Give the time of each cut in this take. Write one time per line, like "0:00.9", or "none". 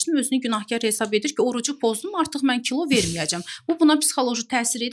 none